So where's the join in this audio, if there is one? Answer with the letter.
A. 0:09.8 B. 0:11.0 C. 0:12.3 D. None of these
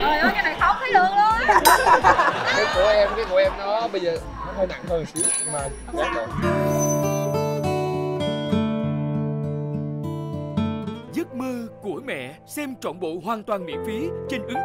B